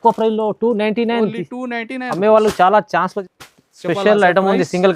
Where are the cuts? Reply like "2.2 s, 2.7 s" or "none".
3.2 s

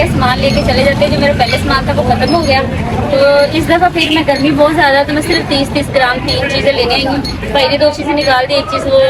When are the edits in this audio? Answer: none

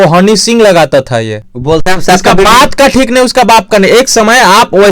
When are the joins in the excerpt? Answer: 1.5 s

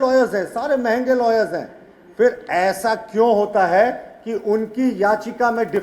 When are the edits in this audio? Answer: none

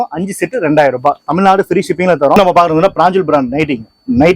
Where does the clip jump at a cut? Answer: 2.4 s

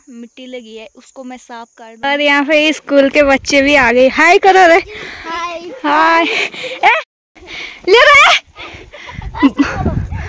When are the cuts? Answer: 1.8 s, 7.0 s

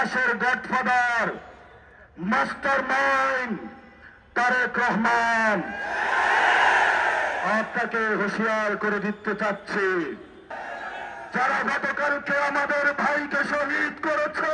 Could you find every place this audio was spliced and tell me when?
10.5 s

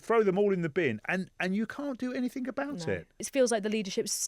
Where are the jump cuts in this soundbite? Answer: 3.3 s

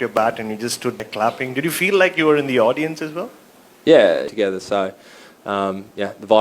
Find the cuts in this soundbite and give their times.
1.0 s, 4.3 s

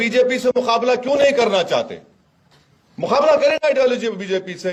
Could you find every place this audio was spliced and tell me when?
none

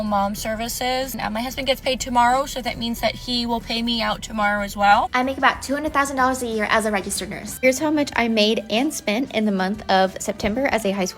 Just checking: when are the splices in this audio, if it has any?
1.1 s, 5.1 s, 7.5 s

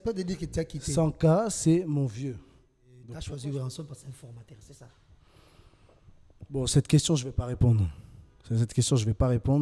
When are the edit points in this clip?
3.1 s

